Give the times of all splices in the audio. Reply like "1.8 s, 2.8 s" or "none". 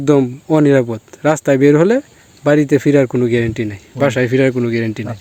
none